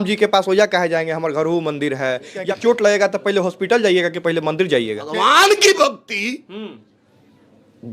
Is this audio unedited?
no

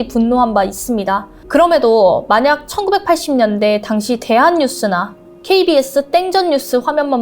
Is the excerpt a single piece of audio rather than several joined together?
no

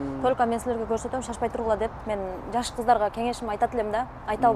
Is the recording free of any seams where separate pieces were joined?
no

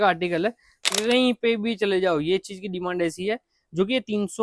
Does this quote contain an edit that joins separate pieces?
yes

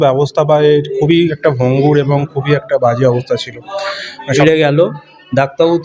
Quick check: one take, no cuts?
no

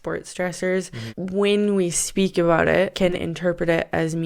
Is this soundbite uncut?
no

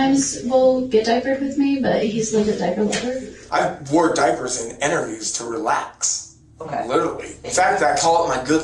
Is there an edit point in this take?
yes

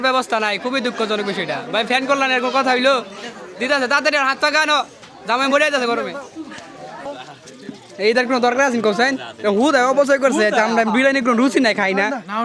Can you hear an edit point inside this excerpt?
yes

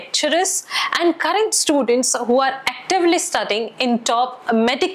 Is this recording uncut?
yes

